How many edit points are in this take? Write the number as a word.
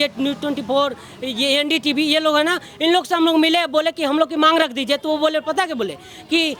zero